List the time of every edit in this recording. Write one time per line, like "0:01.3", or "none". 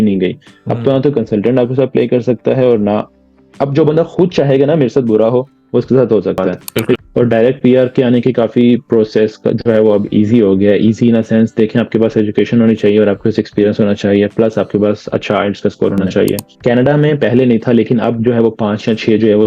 0:07.0
0:16.5